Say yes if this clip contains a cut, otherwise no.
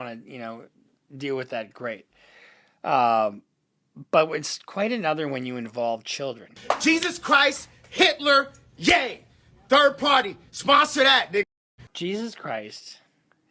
yes